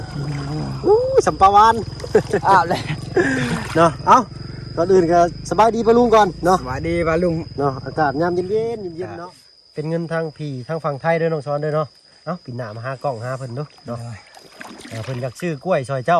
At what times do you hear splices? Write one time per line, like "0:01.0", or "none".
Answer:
0:09.0